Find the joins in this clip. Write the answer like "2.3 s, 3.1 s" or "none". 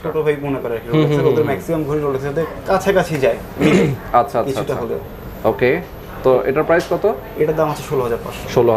none